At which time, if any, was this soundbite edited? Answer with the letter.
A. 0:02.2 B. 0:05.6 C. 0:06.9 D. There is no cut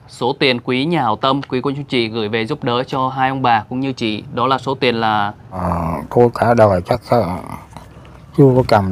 B